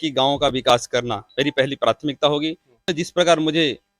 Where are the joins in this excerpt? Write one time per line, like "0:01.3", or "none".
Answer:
0:02.9